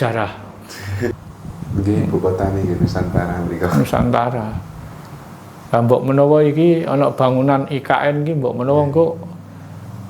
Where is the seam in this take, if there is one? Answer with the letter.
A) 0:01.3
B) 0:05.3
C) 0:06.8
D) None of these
A